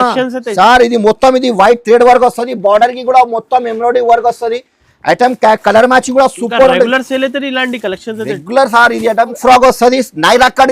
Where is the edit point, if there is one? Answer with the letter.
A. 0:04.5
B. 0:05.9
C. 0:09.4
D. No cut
C